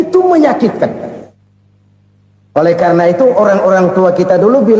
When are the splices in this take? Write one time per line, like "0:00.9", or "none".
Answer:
none